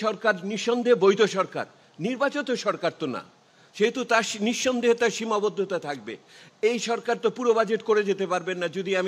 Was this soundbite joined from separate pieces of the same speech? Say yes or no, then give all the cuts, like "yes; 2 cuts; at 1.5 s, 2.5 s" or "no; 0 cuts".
no; 0 cuts